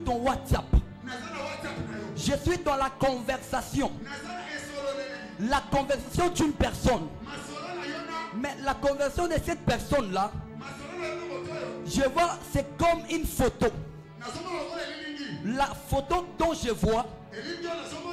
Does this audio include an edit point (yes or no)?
no